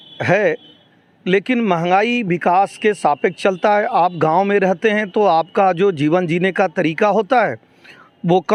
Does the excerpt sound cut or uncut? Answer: uncut